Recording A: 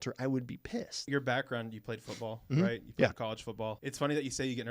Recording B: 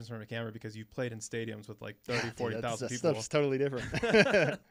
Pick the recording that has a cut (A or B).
A